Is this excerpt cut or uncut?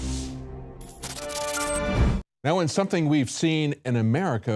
uncut